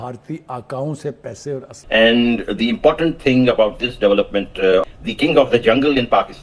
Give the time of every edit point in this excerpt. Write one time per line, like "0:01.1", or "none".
0:01.7
0:05.0